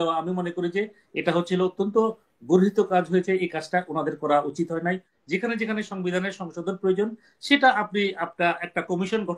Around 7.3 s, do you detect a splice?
no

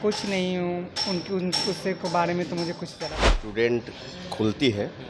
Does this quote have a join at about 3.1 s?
yes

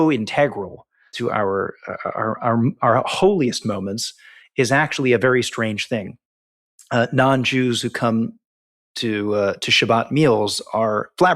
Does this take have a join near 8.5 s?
no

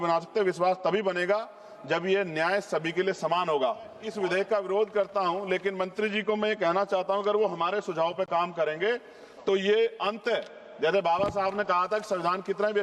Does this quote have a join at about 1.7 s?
no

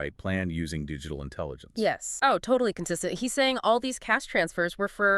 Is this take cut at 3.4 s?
no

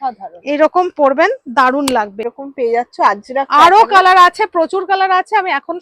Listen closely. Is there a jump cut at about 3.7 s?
no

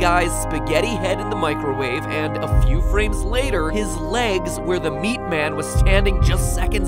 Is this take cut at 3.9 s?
yes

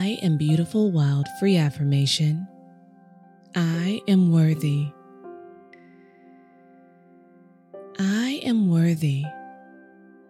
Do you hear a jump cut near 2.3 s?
no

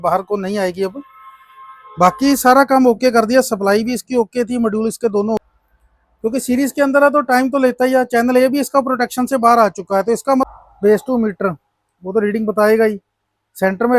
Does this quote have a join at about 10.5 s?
yes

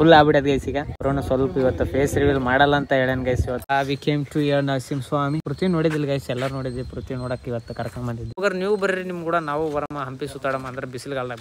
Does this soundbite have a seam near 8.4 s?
yes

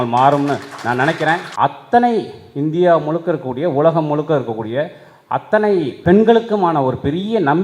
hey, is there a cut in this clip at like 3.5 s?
no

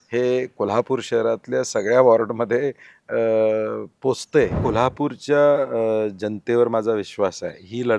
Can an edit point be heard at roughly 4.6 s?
yes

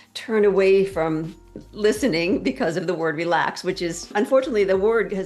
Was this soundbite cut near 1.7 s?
no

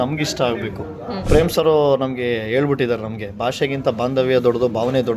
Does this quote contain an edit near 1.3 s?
yes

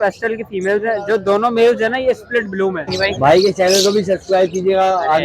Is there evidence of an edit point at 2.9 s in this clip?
yes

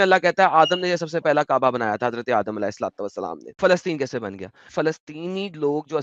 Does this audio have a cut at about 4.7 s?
yes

